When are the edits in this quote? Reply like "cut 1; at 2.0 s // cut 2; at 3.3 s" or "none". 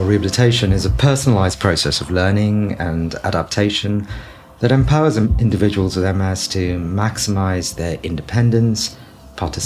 cut 1; at 1.0 s